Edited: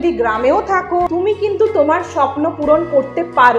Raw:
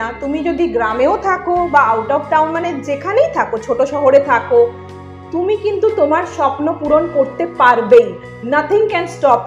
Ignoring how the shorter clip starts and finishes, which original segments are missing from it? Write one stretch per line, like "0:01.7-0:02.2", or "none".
0:01.6-0:05.3